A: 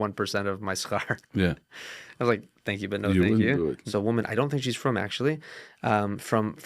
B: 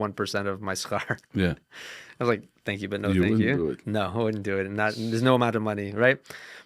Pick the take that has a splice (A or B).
A